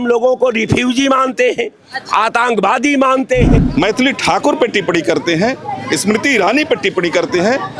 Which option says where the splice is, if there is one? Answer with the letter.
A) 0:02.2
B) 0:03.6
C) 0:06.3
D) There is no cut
B